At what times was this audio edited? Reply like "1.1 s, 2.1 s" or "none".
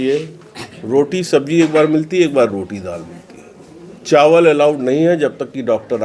none